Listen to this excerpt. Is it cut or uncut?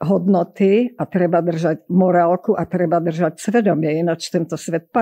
uncut